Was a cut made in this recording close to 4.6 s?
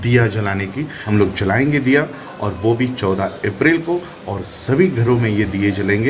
no; 1 cut; at 0.9 s

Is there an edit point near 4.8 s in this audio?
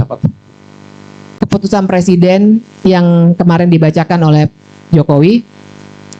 no; 1 cut; at 1.2 s

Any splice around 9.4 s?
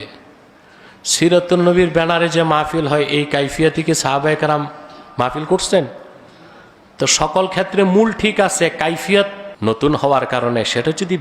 yes; 1 cut; at 9.4 s

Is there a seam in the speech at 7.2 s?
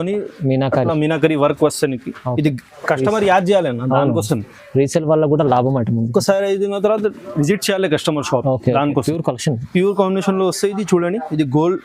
no; 2 cuts; at 2.7 s, 9.1 s

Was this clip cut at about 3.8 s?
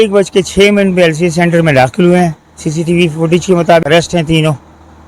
yes; 1 cut; at 3.8 s

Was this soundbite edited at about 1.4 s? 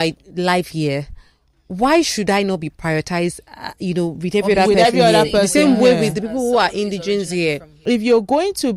no; 1 cut; at 7.7 s

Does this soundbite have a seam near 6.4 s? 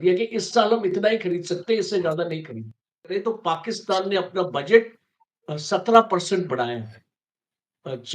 no; 1 cut; at 3.1 s

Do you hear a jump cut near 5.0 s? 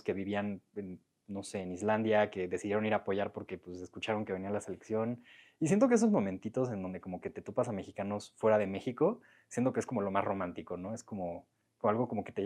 no; 0 cuts

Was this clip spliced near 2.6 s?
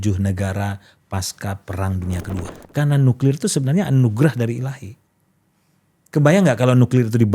yes; 1 cut; at 2.6 s

